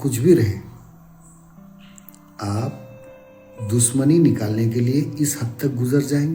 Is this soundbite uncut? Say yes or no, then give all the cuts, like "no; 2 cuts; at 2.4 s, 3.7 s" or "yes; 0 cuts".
yes; 0 cuts